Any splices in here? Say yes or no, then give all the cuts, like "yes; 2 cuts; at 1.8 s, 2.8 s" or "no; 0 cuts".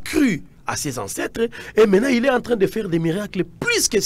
no; 0 cuts